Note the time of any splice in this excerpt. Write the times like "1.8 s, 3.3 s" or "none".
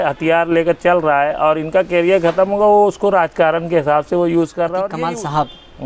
4.9 s